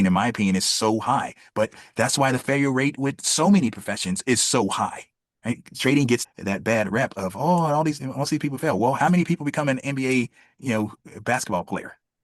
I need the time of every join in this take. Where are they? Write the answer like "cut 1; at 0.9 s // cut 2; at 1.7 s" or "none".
cut 1; at 6.2 s